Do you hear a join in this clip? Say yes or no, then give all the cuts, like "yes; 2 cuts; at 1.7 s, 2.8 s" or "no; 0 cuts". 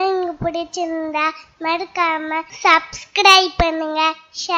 yes; 1 cut; at 2.5 s